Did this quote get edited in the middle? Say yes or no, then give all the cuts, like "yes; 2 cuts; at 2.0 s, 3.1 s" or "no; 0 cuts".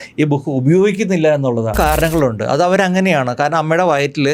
yes; 1 cut; at 1.8 s